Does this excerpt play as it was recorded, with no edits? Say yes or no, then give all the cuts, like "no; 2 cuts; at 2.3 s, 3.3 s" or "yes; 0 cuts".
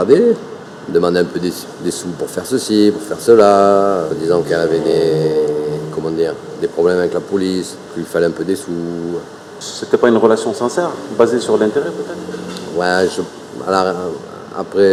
yes; 0 cuts